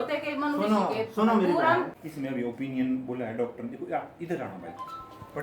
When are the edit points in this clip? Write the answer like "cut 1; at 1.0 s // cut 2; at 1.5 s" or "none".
cut 1; at 2.0 s